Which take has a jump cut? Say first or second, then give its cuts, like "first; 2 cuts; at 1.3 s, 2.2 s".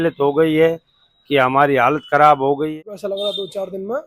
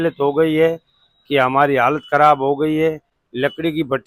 first; 1 cut; at 2.7 s